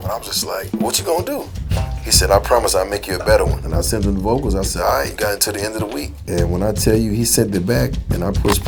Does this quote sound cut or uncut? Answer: uncut